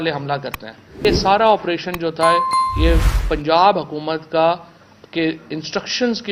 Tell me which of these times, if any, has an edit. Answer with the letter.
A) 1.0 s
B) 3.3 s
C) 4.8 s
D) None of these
A